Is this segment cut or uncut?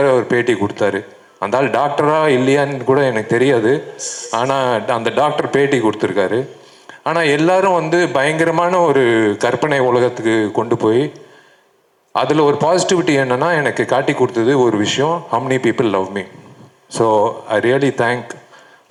uncut